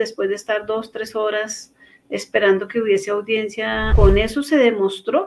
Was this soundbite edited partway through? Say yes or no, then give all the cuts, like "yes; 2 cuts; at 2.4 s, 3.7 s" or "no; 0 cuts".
yes; 1 cut; at 3.9 s